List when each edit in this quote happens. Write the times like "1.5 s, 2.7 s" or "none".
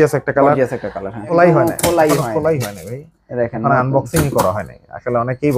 1.3 s